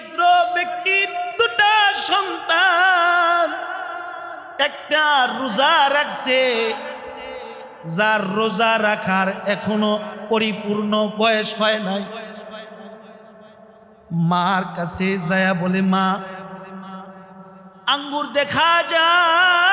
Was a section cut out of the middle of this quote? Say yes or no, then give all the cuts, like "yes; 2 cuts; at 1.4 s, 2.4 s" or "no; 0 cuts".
yes; 1 cut; at 1.3 s